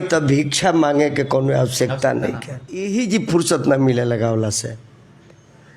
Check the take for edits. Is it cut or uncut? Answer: cut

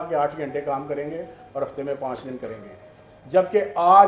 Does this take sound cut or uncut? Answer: uncut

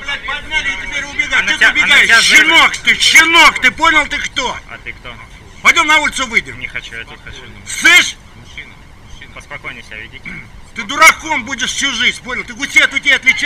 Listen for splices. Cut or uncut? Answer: uncut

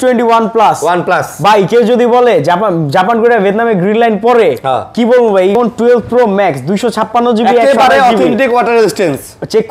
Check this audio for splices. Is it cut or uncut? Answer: cut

